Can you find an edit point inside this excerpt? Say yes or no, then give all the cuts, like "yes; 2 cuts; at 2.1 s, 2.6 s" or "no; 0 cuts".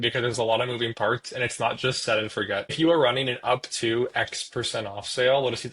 yes; 1 cut; at 2.7 s